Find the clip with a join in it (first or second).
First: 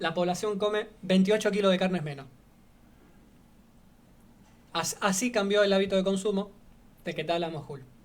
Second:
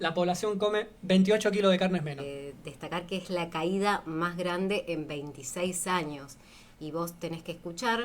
second